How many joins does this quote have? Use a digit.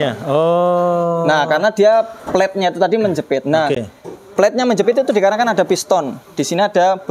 0